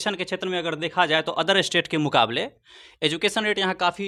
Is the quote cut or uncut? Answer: uncut